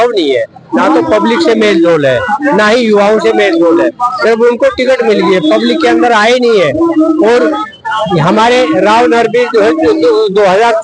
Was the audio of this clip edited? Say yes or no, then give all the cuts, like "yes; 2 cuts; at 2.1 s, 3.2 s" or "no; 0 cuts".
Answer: no; 0 cuts